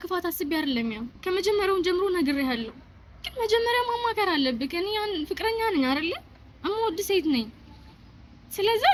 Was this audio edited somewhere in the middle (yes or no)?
no